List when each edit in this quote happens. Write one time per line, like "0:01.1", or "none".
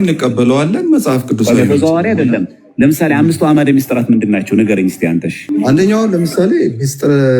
0:05.4